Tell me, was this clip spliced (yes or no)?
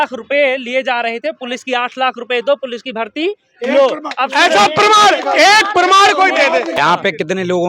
yes